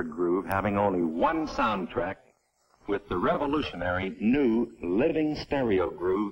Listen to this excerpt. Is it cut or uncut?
cut